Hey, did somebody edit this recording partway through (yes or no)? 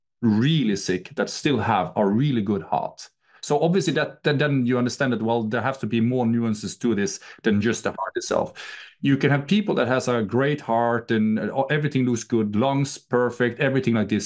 no